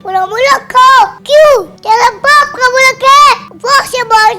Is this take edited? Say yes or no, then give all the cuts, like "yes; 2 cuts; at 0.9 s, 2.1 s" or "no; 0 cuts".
yes; 3 cuts; at 1.2 s, 1.7 s, 3.5 s